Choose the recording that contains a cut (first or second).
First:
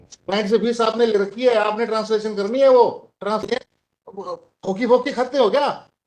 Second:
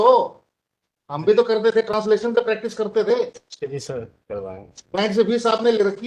first